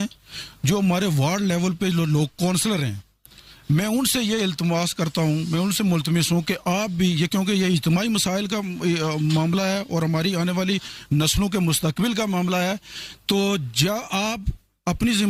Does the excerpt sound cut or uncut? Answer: uncut